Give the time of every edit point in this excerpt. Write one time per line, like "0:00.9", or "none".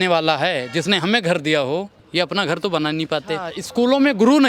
0:02.0
0:03.6

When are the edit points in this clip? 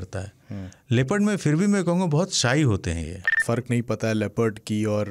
0:03.4

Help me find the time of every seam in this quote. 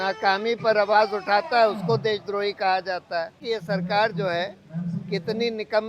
0:03.4

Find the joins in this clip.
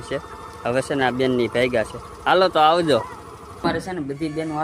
0:03.6

